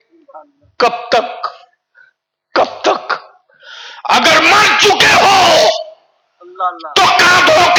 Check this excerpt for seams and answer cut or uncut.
uncut